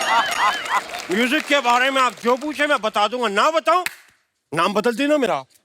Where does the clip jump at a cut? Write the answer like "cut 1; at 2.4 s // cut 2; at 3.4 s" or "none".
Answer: cut 1; at 0.9 s